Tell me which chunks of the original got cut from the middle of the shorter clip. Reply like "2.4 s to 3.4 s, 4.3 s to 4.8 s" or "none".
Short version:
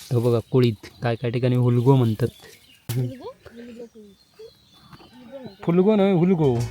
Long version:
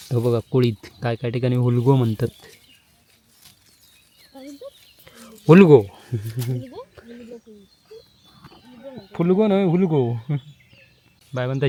2.9 s to 6.4 s

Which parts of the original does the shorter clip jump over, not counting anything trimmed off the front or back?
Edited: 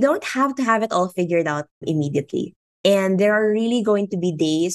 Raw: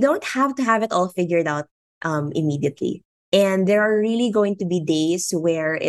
1.8 s to 2.3 s

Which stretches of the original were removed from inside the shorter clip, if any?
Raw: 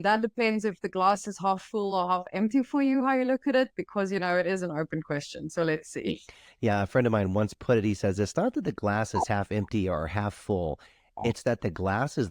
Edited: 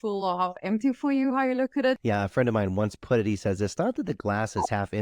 3.7 s to 6.6 s

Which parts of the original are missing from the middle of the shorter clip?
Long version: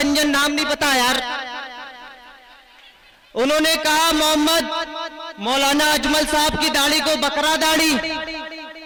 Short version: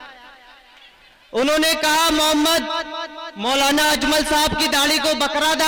none

